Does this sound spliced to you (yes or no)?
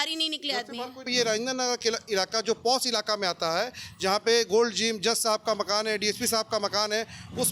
yes